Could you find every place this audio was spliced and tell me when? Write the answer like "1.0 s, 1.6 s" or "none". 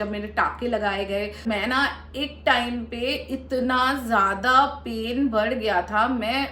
1.5 s